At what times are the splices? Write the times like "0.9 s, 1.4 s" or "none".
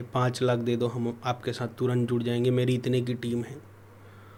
none

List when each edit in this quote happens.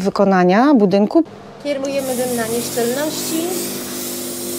1.3 s

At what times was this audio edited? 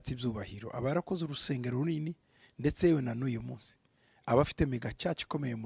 none

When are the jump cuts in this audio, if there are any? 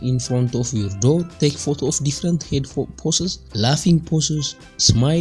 1.3 s, 3.4 s

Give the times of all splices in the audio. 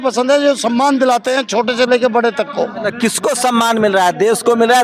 2.9 s

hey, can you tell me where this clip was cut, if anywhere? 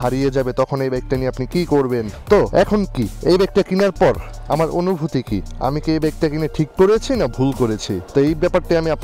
2.1 s

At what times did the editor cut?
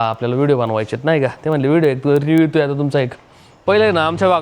3.5 s

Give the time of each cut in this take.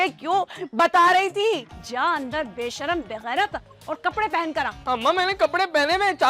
1.7 s

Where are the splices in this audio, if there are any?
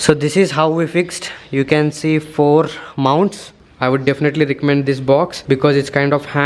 3.4 s

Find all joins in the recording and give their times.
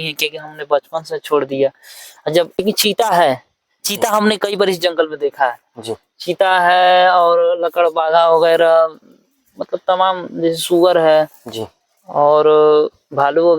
2.5 s

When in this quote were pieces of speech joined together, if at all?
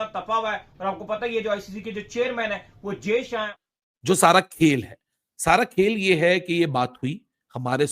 3.6 s

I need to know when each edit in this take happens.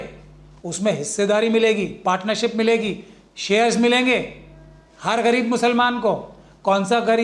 none

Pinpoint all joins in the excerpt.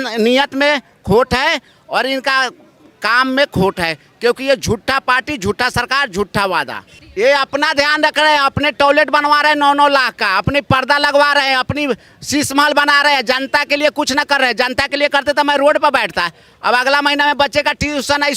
7.0 s

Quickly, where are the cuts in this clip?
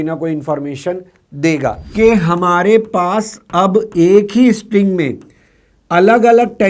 1.8 s

